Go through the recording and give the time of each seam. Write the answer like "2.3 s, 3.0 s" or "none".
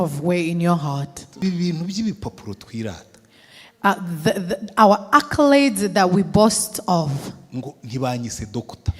1.4 s